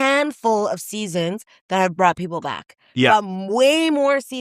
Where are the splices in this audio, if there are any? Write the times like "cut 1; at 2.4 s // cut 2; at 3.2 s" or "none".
none